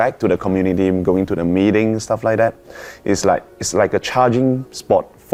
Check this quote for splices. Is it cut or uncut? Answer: uncut